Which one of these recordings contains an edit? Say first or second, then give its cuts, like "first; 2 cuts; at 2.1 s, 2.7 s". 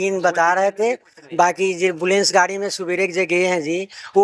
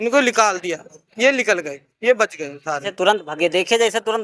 second; 1 cut; at 2.9 s